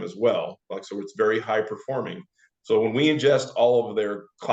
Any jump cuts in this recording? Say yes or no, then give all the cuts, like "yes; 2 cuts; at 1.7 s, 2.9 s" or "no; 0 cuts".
no; 0 cuts